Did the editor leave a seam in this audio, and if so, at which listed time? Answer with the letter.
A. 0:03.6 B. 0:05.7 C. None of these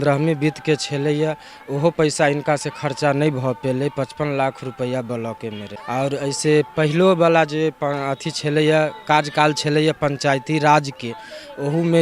B